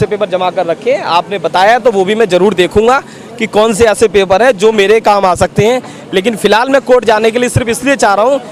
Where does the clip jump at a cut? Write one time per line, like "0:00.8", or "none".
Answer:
none